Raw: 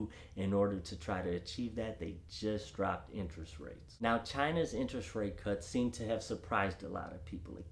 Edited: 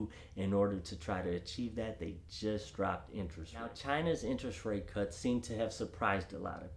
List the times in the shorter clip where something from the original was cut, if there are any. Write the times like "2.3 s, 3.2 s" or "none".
3.8 s